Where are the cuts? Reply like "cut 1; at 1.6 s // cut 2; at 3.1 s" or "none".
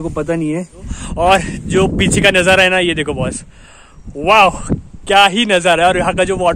cut 1; at 1.0 s